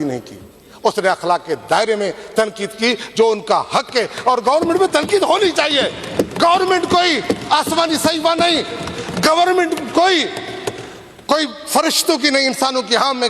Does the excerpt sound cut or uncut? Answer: uncut